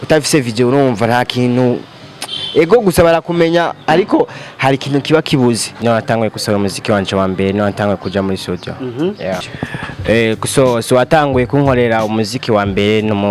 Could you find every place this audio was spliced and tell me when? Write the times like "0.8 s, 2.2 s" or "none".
5.7 s, 9.5 s